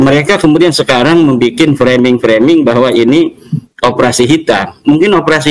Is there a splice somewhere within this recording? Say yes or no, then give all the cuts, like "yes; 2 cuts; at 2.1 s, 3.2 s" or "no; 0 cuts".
no; 0 cuts